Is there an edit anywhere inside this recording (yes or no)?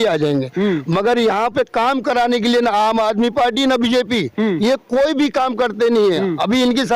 no